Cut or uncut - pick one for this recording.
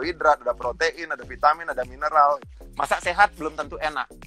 cut